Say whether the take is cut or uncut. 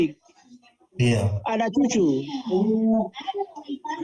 uncut